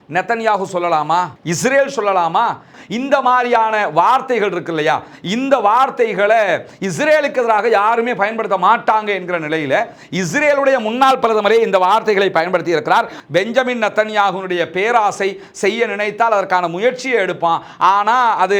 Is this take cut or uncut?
cut